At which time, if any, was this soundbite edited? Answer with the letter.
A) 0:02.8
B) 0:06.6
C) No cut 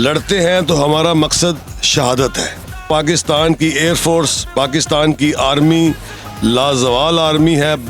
A